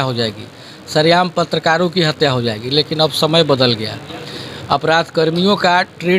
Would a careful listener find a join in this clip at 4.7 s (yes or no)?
no